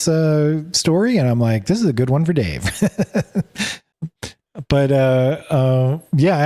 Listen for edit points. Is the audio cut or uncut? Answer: uncut